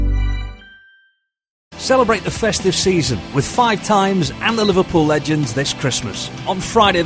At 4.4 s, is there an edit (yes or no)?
no